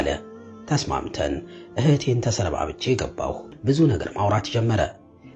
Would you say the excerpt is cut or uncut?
cut